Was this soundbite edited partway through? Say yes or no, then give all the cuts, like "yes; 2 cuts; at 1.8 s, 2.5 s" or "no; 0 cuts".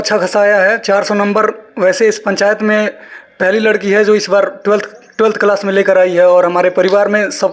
no; 0 cuts